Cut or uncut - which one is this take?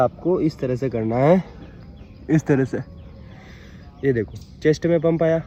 uncut